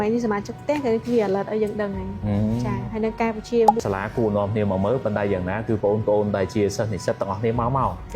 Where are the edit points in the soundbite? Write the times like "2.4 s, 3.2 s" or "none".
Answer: 3.8 s

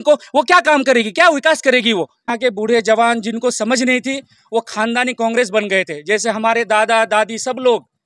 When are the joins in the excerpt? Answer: 2.3 s

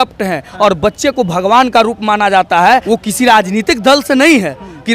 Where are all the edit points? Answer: 2.8 s

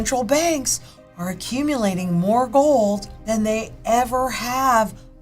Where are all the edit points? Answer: 3.1 s

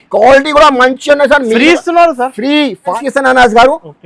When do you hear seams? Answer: 2.9 s

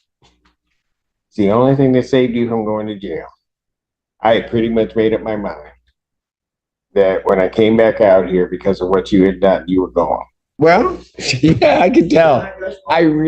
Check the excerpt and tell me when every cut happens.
10.4 s

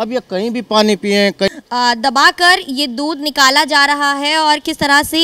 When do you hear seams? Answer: 1.5 s

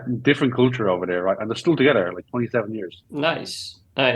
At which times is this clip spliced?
3.0 s

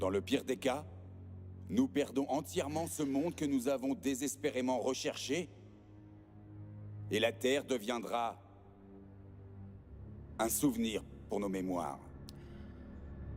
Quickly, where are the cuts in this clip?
10.2 s

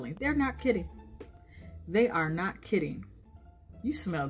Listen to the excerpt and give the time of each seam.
3.2 s

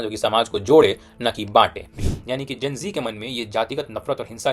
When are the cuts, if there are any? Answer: 2.0 s

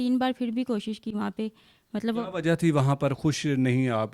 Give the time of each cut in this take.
none

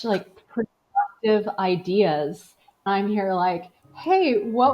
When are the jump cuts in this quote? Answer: 2.9 s

